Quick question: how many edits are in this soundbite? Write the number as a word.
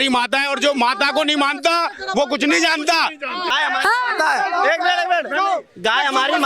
one